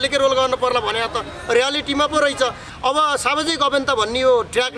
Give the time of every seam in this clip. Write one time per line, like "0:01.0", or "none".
0:02.6